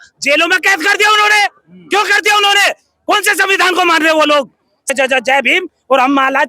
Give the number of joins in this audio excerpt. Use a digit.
1